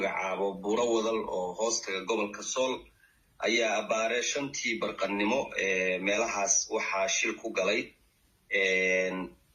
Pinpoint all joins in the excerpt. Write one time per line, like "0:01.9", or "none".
none